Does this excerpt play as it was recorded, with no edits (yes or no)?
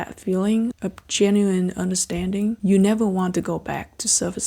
no